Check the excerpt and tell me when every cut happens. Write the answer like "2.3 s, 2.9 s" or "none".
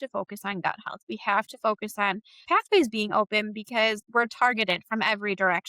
2.4 s, 4.0 s